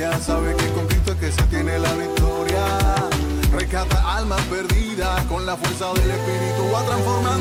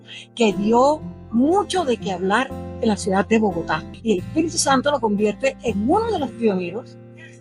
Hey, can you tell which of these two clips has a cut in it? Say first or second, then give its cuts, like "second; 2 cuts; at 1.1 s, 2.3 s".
second; 1 cut; at 3.9 s